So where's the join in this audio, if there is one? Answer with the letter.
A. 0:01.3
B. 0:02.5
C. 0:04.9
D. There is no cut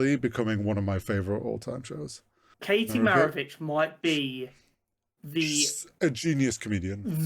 B